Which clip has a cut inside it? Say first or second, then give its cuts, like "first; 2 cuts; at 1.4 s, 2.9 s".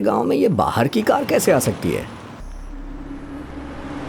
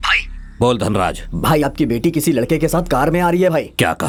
first; 1 cut; at 2.4 s